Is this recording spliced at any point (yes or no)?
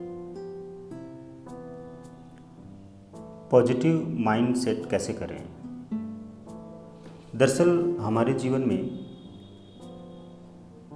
yes